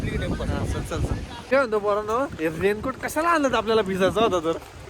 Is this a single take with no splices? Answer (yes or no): no